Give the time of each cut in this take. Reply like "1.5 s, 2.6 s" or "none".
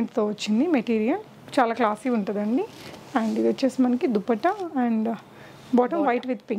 none